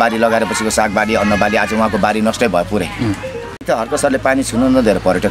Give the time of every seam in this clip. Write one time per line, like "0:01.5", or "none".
0:03.6